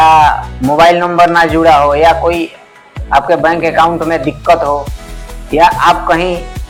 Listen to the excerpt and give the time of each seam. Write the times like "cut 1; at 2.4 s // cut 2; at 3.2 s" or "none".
none